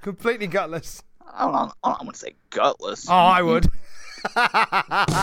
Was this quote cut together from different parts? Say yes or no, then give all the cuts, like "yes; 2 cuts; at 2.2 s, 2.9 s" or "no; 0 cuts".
no; 0 cuts